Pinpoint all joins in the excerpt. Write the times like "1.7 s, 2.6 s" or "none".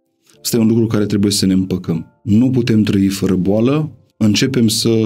2.1 s, 4.0 s